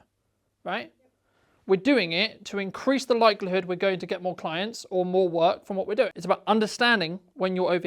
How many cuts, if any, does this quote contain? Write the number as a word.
one